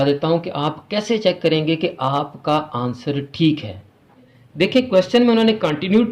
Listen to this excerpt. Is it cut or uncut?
cut